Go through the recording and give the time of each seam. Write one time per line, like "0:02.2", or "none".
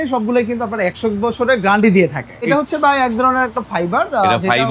0:02.5